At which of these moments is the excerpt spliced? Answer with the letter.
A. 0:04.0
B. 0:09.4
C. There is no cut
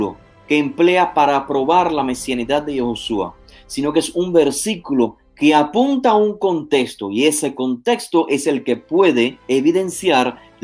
B